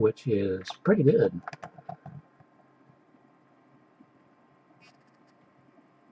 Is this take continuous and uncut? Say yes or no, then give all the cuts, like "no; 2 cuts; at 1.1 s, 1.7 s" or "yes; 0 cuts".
no; 1 cut; at 1.2 s